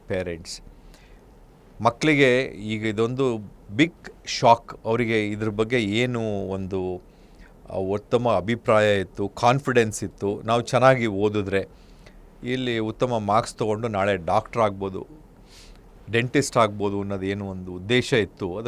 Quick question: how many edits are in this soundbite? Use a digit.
0